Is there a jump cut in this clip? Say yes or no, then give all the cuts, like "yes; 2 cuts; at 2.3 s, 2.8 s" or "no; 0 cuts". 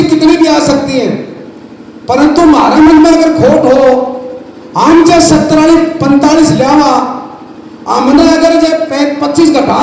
no; 0 cuts